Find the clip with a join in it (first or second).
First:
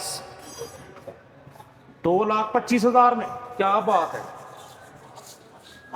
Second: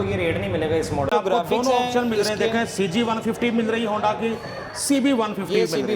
second